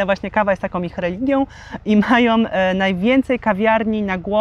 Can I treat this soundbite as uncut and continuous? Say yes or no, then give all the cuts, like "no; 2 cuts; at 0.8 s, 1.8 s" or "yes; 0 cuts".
yes; 0 cuts